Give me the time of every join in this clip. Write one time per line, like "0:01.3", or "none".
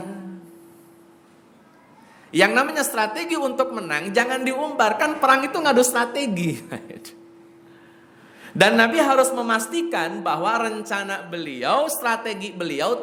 none